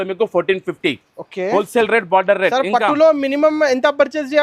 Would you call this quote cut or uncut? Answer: uncut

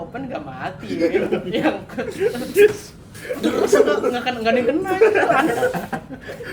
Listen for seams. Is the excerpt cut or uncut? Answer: uncut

